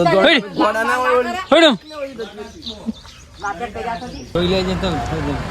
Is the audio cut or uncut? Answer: cut